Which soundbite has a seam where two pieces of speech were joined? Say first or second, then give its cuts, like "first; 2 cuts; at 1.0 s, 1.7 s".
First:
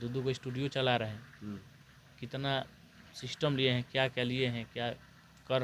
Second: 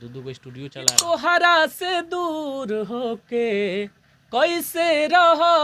second; 1 cut; at 1.0 s